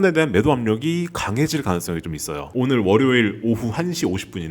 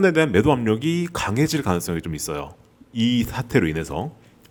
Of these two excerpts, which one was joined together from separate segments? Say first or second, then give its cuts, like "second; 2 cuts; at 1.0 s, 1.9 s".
first; 1 cut; at 2.5 s